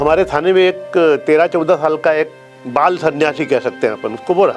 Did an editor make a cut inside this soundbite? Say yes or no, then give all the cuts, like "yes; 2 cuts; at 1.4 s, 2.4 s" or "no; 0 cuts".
no; 0 cuts